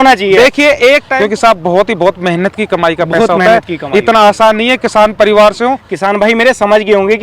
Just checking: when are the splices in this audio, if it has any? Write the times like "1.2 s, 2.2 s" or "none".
1.1 s, 5.9 s